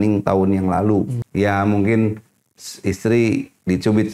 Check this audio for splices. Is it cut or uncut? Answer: cut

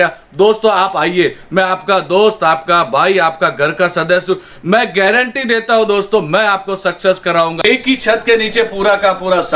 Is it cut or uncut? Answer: cut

